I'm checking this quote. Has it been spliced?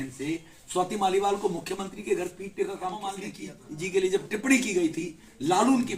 yes; 1 cut; at 3.3 s

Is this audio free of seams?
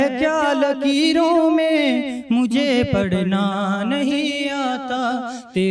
yes; 0 cuts

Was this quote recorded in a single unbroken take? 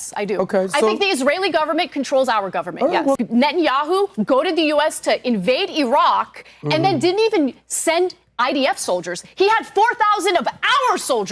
no; 1 cut; at 3.2 s

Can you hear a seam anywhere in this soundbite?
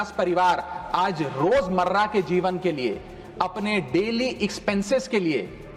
no; 0 cuts

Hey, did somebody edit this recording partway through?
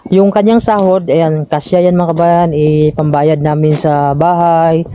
no; 0 cuts

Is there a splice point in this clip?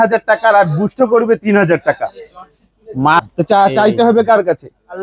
yes; 1 cut; at 3.2 s

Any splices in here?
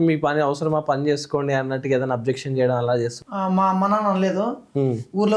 yes; 1 cut; at 3.2 s

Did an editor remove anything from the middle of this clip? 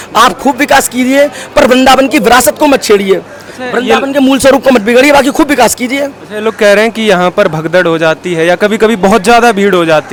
no; 0 cuts

